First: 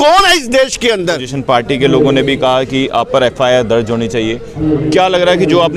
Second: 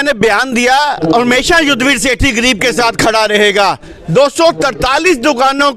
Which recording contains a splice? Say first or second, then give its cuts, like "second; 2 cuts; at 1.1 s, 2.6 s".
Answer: first; 1 cut; at 1.3 s